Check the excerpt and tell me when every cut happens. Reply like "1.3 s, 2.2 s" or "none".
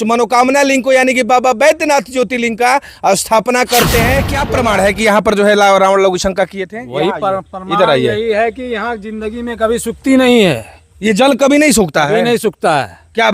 4.4 s